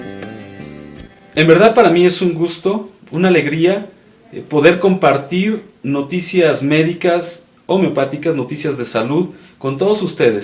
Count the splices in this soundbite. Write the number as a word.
one